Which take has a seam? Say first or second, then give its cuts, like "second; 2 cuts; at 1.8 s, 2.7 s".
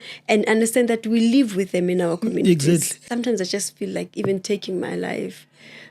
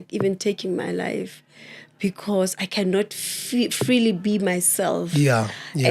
first; 1 cut; at 3.1 s